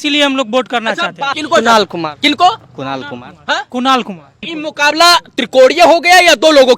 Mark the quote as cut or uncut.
cut